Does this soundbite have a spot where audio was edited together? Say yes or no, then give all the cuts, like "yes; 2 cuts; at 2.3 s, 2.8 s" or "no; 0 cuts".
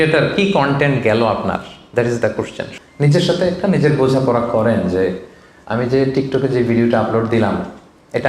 yes; 1 cut; at 2.6 s